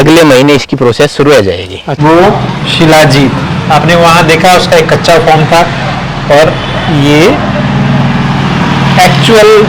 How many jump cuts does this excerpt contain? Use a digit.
1